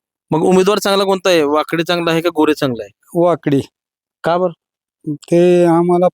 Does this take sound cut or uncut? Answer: uncut